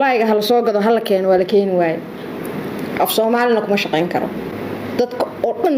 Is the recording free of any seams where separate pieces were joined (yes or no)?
yes